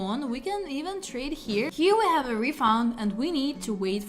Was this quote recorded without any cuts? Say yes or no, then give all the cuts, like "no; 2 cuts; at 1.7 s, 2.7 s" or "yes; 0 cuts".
no; 1 cut; at 1.7 s